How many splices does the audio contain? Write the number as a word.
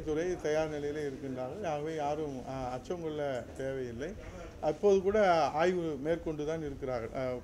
zero